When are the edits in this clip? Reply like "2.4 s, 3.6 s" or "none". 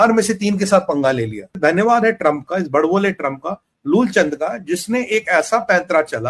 1.5 s